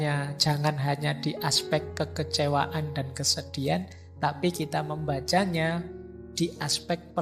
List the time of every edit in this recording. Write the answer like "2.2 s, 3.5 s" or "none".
none